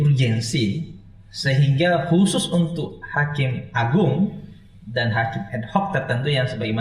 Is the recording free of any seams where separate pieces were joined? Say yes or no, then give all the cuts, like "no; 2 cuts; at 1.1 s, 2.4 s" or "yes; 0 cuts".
yes; 0 cuts